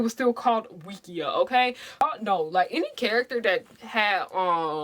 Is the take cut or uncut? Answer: cut